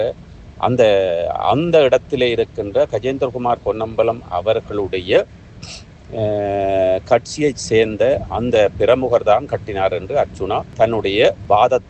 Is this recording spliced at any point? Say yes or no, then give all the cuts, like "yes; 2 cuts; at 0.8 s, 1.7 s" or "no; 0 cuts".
no; 0 cuts